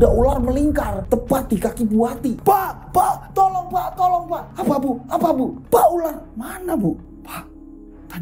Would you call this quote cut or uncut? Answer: cut